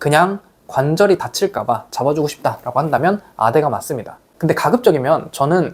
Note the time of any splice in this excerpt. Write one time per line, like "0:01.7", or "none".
none